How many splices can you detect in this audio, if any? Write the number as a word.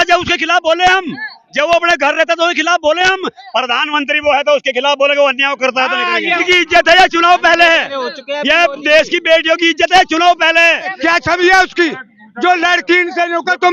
two